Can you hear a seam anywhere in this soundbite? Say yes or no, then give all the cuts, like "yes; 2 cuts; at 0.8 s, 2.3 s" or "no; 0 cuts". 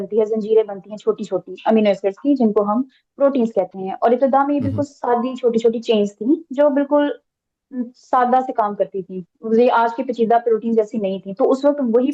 no; 0 cuts